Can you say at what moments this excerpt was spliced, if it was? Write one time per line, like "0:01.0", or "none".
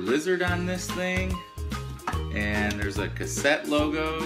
0:02.2